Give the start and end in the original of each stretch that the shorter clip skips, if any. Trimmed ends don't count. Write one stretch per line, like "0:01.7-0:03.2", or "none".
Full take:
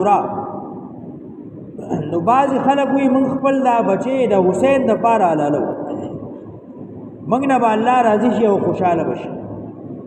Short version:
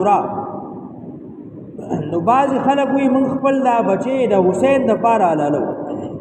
none